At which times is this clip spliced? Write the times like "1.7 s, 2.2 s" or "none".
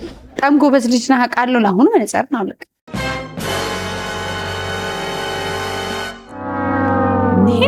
none